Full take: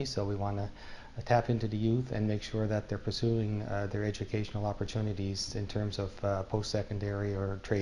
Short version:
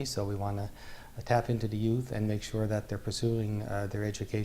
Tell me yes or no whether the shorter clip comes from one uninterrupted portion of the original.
yes